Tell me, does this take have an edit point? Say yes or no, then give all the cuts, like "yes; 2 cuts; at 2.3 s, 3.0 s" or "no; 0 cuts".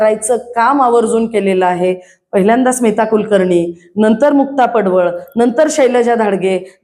no; 0 cuts